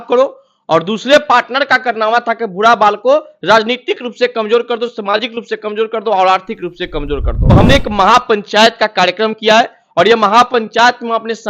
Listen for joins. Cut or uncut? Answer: cut